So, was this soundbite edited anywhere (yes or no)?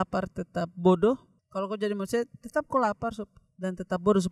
yes